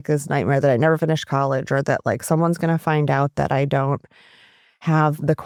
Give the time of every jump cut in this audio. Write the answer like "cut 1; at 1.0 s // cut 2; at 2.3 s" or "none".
none